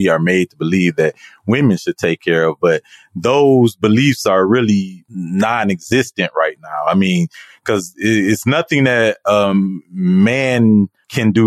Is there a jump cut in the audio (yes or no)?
no